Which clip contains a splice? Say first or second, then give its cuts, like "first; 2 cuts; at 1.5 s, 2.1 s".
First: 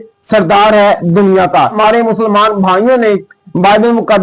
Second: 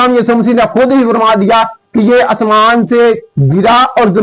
first; 1 cut; at 1.8 s